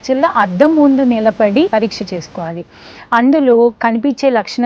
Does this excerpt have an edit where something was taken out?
yes; 1 cut; at 1.7 s

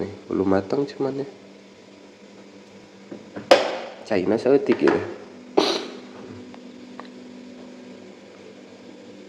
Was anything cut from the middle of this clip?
no; 0 cuts

